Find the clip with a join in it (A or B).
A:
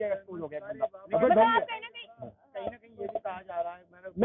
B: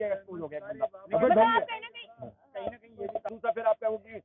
B